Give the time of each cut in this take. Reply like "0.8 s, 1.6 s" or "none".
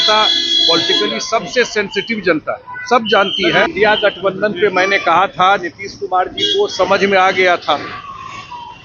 3.7 s